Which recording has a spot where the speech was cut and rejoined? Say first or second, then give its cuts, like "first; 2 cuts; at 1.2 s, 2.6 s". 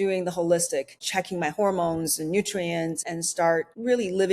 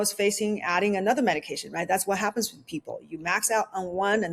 first; 2 cuts; at 1.0 s, 3.6 s